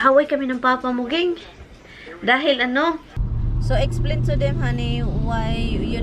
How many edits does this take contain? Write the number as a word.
one